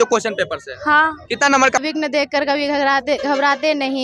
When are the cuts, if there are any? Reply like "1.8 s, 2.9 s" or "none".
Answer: 1.8 s